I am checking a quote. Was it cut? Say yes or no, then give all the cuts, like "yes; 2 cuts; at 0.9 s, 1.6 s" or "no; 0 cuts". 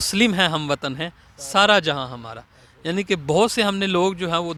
no; 0 cuts